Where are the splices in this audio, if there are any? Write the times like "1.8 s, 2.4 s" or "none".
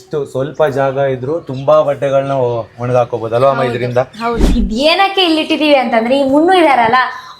4.4 s